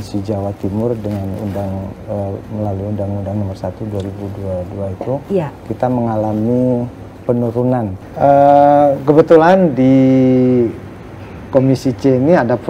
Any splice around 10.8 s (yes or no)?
no